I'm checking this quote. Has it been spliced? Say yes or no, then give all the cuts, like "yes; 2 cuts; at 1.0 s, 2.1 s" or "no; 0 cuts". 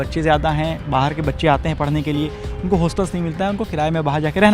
no; 0 cuts